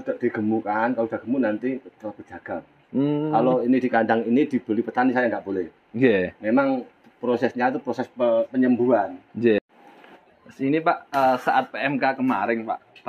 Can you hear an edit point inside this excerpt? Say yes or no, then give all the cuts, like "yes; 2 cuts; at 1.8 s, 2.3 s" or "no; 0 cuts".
yes; 1 cut; at 9.6 s